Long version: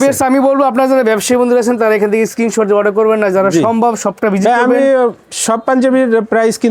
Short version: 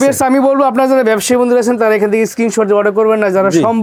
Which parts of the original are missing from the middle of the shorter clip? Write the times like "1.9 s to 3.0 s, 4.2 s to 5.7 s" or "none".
none

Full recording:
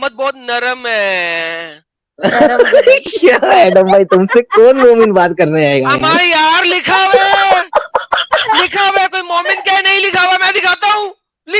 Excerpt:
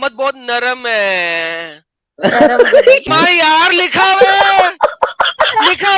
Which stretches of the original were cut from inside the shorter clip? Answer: 3.1 s to 6.0 s

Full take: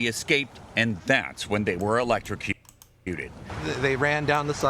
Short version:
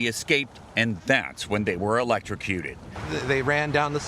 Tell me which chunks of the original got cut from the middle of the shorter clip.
2.4 s to 3.0 s

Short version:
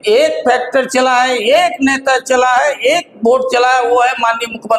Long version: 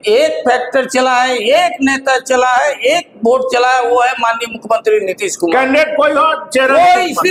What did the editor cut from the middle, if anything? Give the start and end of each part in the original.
none

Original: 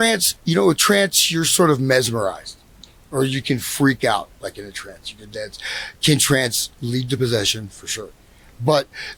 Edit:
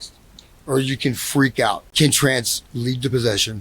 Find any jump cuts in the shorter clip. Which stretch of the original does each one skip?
4.3 s to 5.9 s

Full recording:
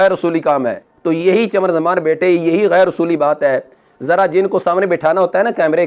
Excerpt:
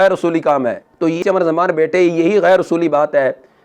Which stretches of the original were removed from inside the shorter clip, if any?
1.2 s to 1.5 s

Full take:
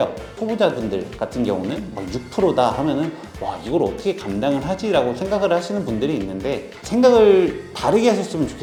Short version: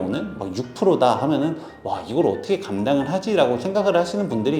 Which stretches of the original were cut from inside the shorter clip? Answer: none

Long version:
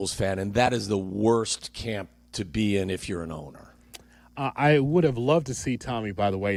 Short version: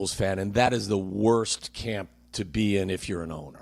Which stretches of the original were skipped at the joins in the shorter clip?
none

